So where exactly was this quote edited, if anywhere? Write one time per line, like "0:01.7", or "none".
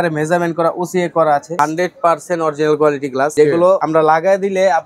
0:01.6
0:03.6